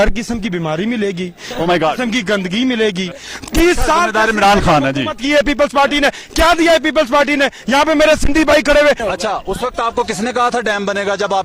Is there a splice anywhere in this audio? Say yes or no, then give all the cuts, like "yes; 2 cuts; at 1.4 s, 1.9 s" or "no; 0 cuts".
yes; 2 cuts; at 3.2 s, 9.0 s